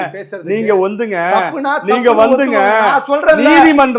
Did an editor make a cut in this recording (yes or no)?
no